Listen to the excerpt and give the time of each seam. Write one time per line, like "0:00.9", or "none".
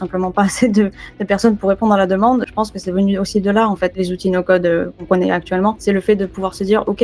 0:02.5
0:04.0
0:05.0
0:05.8